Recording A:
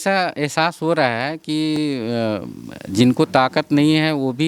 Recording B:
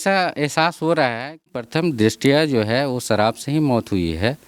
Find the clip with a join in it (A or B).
B